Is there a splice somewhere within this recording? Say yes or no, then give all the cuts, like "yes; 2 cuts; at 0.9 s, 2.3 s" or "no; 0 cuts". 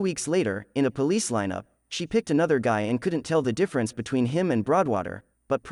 yes; 1 cut; at 4.0 s